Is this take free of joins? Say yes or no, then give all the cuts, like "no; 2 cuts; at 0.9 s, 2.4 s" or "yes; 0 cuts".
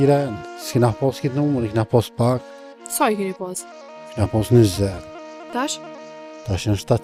yes; 0 cuts